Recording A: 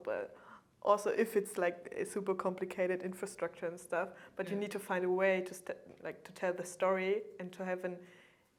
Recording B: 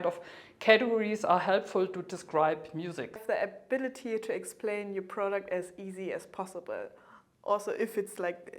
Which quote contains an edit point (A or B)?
B